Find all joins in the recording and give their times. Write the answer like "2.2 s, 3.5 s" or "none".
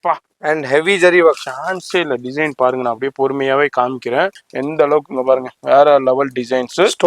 4.5 s